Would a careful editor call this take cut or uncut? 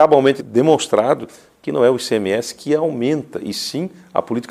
uncut